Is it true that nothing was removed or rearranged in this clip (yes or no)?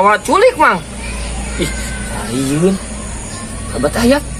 yes